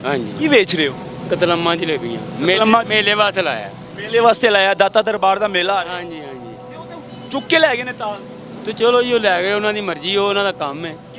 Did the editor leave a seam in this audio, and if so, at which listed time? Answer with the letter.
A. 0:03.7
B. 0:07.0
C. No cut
C